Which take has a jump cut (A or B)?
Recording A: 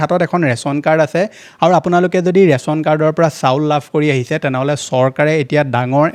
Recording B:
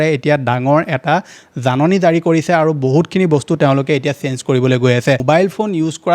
B